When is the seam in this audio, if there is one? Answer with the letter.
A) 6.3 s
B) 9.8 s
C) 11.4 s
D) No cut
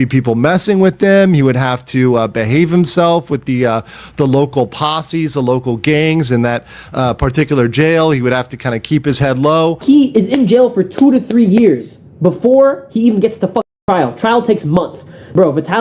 B